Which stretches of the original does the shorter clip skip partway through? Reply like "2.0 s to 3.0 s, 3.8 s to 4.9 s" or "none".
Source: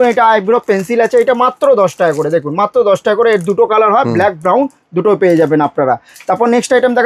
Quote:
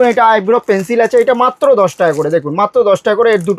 none